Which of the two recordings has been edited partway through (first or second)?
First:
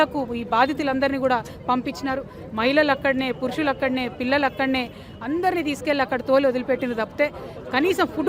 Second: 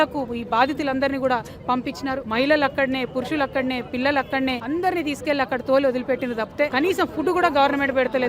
second